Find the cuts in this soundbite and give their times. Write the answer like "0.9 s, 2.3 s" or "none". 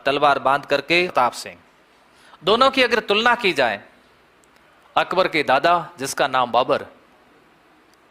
1.1 s